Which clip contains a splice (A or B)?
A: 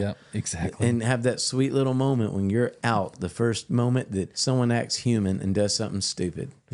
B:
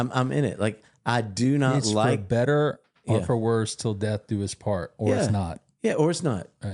A